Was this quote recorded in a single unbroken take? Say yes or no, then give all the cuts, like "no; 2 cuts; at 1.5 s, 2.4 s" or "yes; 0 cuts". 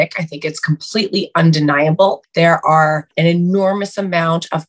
no; 1 cut; at 3.1 s